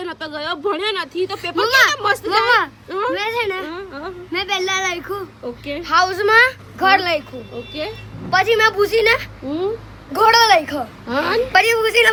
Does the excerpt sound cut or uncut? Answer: uncut